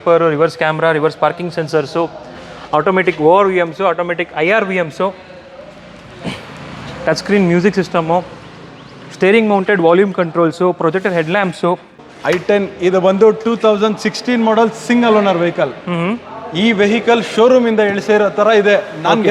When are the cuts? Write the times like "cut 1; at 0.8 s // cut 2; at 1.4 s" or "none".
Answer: cut 1; at 12.0 s